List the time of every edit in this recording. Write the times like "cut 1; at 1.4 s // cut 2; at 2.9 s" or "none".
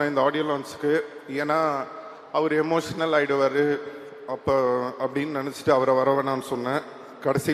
none